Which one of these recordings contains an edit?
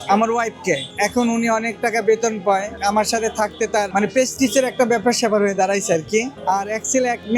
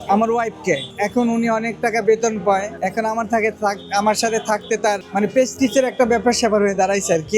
first; 3 cuts; at 2.7 s, 3.9 s, 6.4 s

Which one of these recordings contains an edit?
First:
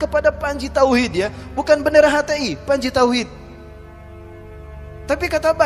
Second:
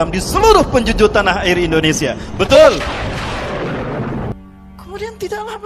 second; 1 cut; at 4.3 s

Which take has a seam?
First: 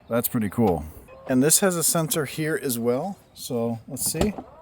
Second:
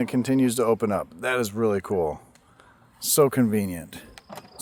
first; 1 cut; at 1.1 s

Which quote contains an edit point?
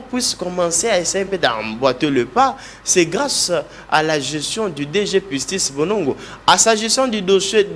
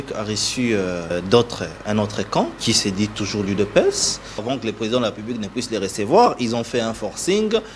second; 3 cuts; at 1.1 s, 2.6 s, 4.4 s

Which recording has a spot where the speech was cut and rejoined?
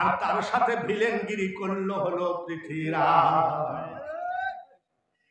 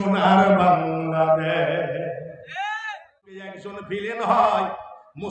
second; 1 cut; at 3.7 s

